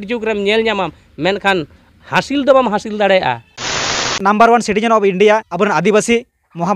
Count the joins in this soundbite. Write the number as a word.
two